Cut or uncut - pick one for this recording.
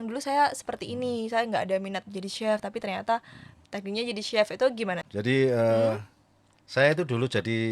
cut